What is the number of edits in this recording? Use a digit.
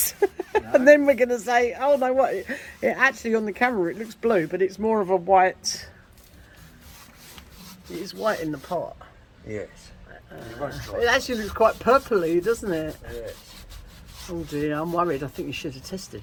0